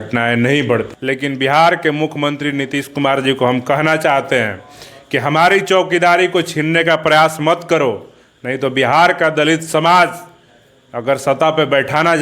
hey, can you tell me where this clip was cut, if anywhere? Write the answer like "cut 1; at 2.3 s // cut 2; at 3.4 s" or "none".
cut 1; at 0.9 s